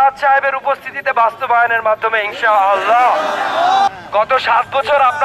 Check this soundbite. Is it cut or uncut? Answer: cut